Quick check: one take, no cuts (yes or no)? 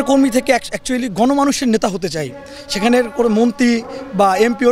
yes